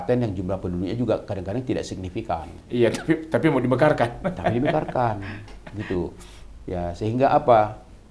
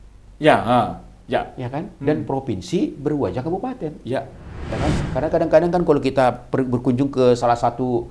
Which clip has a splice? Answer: second; 1 cut; at 4.8 s

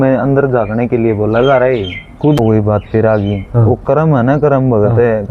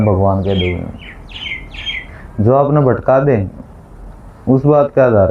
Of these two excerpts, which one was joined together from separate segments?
first; 1 cut; at 2.4 s

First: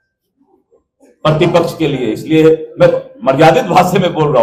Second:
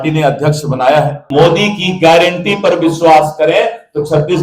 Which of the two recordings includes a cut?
second; 1 cut; at 1.2 s

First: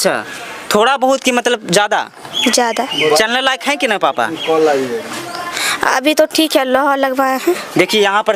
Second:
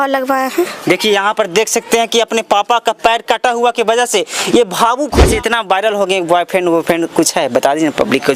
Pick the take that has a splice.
second; 1 cut; at 5.3 s

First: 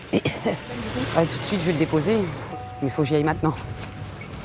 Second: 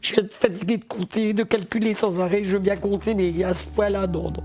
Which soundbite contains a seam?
first; 1 cut; at 1.0 s

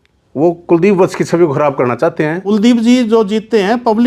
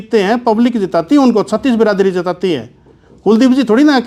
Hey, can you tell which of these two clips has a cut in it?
first; 1 cut; at 2.4 s

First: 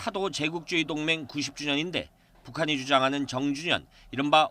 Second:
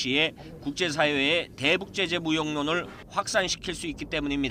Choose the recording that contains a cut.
first; 1 cut; at 2.4 s

